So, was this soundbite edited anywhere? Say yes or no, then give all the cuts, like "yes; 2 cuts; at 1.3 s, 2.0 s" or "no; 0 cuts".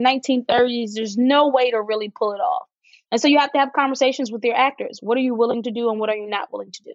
no; 0 cuts